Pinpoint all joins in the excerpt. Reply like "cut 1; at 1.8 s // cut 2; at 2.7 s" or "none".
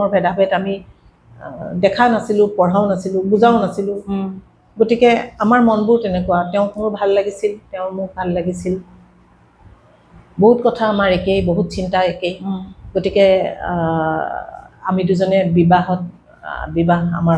none